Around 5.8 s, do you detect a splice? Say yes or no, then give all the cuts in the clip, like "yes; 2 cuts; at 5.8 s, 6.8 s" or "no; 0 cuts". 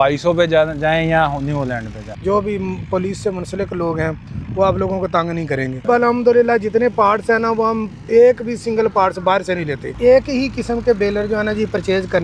yes; 3 cuts; at 2.0 s, 5.8 s, 9.9 s